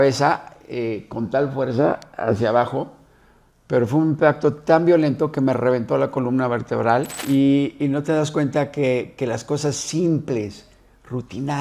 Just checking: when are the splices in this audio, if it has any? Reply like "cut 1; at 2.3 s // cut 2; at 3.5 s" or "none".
cut 1; at 7.2 s